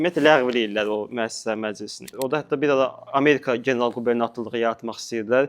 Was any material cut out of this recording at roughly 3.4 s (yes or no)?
no